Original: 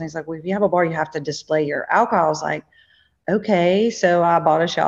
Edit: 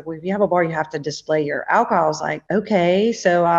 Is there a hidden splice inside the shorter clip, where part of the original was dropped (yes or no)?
yes